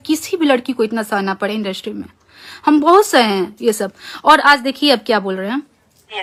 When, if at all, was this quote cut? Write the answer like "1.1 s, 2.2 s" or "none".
none